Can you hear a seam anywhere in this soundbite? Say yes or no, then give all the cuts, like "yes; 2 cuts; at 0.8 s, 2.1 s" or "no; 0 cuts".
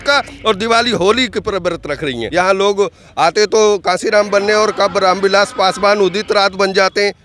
yes; 1 cut; at 2.2 s